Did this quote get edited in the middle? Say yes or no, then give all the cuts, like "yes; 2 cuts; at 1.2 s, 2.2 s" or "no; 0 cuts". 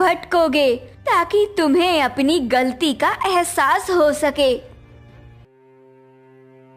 yes; 1 cut; at 5.4 s